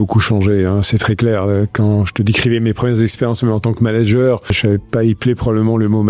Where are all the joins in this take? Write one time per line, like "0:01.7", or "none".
0:04.6